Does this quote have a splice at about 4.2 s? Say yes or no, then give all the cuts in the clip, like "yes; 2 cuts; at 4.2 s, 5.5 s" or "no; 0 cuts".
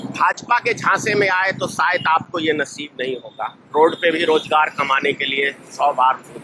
no; 0 cuts